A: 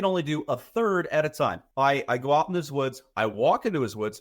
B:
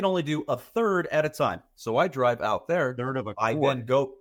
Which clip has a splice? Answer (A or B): A